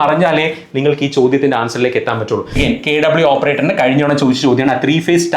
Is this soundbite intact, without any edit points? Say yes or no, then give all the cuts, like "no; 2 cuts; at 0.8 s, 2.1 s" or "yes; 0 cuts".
no; 1 cut; at 2.5 s